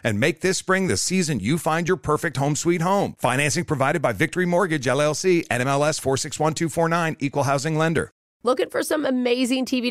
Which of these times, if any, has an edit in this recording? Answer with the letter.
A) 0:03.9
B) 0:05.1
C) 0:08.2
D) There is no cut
C